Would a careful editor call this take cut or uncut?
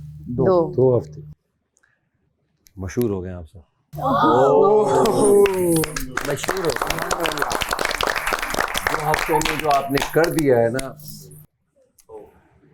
uncut